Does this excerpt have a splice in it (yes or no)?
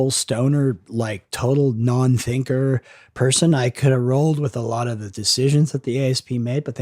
no